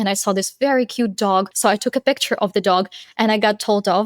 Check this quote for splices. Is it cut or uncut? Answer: cut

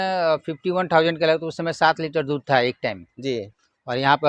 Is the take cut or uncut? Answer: uncut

